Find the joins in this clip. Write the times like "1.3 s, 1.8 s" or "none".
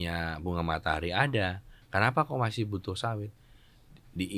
none